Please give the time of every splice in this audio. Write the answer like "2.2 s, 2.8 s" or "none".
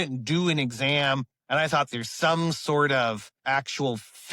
1.9 s, 3.4 s